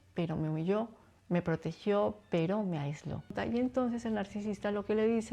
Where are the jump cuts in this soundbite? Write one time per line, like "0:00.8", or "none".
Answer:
0:03.3